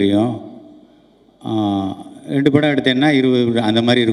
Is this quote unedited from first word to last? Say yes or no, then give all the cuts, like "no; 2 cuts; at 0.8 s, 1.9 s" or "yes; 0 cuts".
yes; 0 cuts